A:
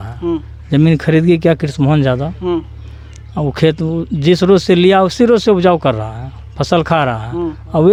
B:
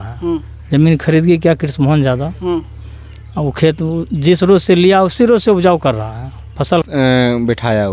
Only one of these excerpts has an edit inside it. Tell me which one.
B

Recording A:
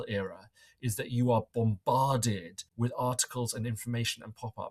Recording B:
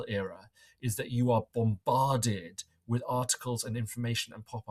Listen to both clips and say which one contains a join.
A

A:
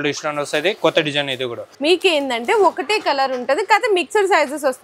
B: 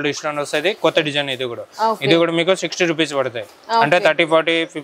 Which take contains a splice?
A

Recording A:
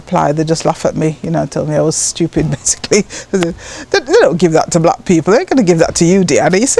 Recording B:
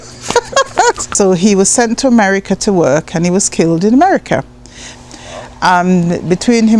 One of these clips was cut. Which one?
B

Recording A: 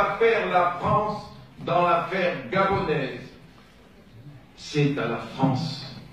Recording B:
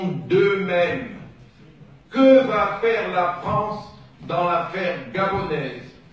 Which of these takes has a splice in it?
A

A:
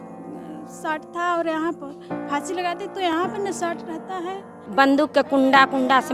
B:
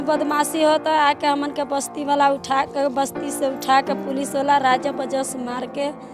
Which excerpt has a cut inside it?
A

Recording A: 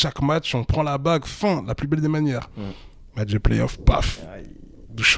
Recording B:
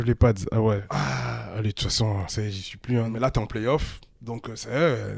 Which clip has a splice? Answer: B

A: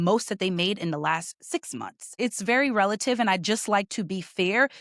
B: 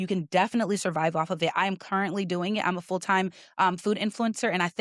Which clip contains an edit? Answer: A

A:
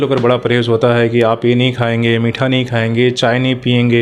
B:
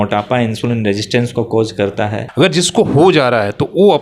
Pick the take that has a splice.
B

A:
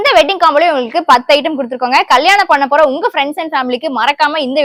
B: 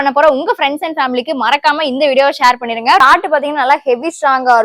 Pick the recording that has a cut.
B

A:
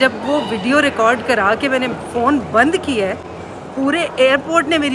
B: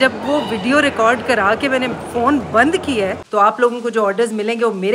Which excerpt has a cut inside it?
B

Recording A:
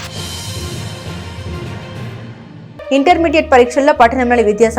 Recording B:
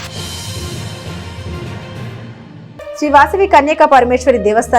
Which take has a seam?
A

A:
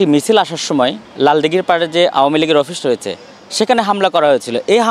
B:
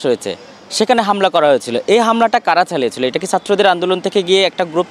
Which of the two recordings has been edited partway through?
A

